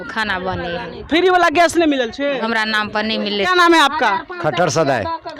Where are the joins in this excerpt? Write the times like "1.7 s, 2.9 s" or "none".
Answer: none